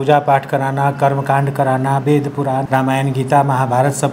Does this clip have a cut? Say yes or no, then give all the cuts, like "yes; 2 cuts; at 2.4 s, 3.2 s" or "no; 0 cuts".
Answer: yes; 1 cut; at 2.7 s